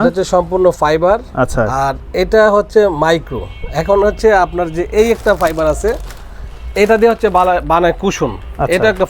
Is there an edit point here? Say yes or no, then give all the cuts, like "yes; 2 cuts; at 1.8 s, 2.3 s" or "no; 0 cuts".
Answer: no; 0 cuts